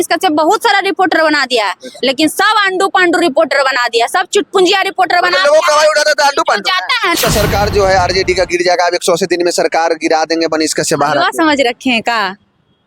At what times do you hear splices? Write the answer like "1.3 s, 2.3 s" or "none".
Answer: 7.1 s